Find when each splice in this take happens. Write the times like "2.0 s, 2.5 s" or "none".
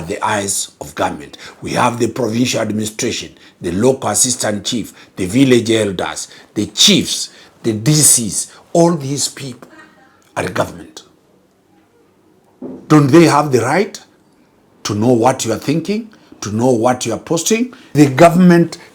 17.9 s